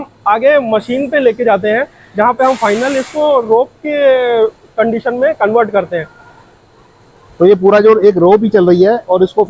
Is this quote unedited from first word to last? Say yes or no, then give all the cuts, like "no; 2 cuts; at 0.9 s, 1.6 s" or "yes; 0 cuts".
yes; 0 cuts